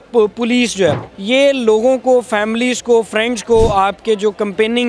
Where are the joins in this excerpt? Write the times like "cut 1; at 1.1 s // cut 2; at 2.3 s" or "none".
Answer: cut 1; at 1.1 s